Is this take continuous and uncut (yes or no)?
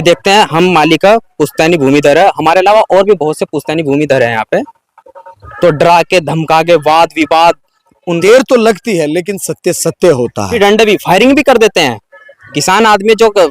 no